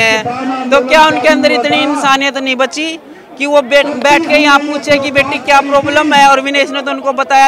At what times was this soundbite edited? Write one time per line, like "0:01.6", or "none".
none